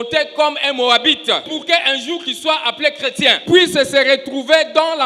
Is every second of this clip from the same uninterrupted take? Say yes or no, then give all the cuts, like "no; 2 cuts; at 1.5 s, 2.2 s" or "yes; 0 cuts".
no; 2 cuts; at 1.5 s, 3.4 s